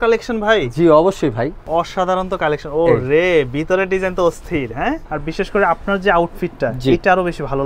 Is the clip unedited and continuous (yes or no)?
no